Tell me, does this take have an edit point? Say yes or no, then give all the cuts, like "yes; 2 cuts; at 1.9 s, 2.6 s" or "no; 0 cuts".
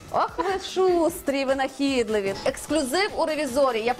yes; 1 cut; at 2.3 s